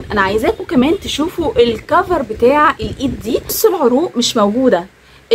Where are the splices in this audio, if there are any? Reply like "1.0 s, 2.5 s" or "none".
3.6 s

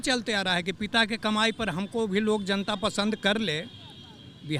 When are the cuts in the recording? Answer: none

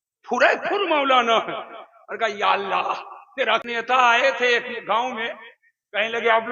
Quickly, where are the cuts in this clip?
3.6 s

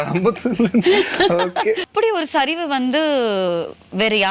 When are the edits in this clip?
1.9 s

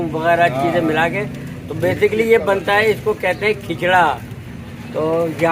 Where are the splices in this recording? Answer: none

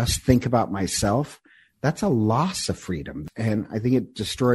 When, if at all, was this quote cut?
3.2 s

